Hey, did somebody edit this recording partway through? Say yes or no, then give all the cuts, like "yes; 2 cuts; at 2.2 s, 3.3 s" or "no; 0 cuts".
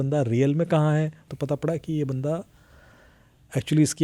yes; 1 cut; at 1.3 s